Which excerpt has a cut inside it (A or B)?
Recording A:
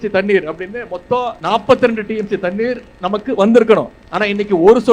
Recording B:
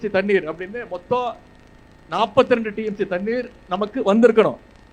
A